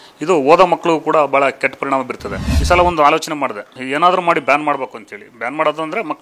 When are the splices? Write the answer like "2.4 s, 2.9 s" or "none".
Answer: 2.5 s, 3.8 s